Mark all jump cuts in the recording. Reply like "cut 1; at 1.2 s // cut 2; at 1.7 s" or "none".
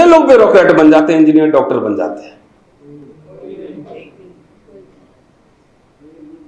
none